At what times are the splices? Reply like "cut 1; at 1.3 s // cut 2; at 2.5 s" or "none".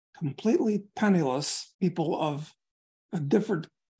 cut 1; at 1.6 s